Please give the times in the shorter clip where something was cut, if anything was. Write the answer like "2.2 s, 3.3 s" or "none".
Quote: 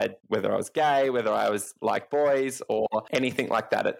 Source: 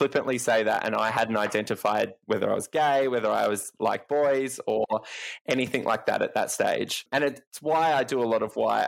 3.1 s